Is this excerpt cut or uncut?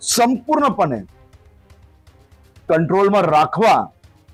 uncut